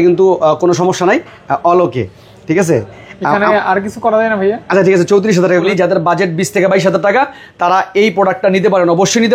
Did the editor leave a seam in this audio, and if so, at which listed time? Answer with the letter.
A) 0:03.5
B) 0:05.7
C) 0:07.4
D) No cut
B